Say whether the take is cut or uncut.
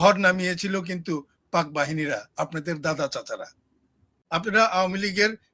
cut